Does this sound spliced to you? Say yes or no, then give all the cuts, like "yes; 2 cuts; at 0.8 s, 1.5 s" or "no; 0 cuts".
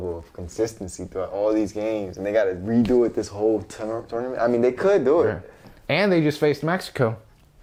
no; 0 cuts